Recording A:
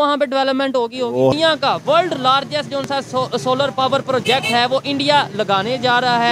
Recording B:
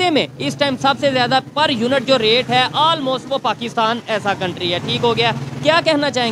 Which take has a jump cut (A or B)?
A